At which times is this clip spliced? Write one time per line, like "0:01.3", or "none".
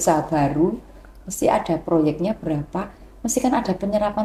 none